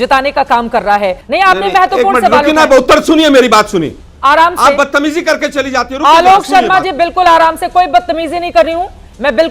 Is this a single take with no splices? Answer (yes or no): no